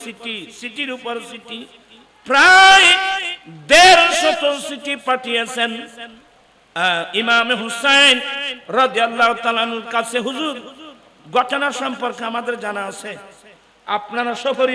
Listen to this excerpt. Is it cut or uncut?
uncut